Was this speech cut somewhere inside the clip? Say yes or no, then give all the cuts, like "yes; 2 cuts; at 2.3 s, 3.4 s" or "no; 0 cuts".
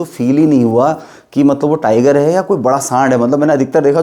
no; 0 cuts